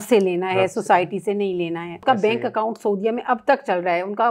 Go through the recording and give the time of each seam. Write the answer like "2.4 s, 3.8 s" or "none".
2.0 s

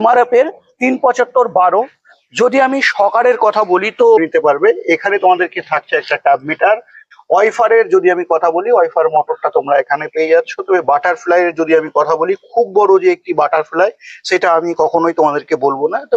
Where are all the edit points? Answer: 4.2 s

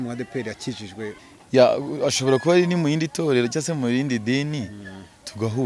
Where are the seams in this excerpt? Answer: 1.3 s

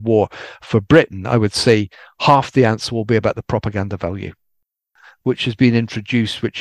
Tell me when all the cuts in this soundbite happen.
4.8 s

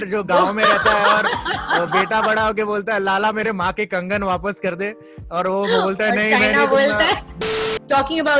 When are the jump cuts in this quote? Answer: 7.4 s

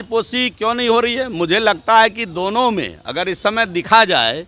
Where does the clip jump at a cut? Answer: none

